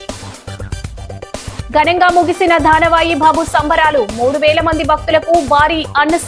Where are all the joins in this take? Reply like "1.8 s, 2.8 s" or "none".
1.4 s